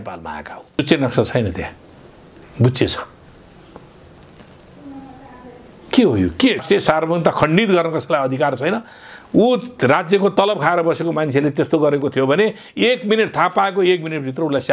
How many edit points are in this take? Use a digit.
2